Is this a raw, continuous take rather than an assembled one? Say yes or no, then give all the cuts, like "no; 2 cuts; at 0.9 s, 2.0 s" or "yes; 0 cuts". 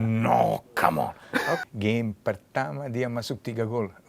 no; 1 cut; at 1.6 s